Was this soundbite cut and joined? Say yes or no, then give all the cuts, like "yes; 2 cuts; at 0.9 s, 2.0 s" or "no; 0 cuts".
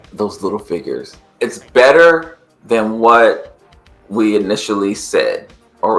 yes; 1 cut; at 1.2 s